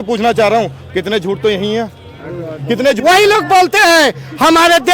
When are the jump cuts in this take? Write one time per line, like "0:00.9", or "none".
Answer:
0:03.0